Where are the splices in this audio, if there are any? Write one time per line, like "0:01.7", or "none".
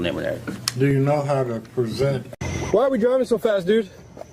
0:02.3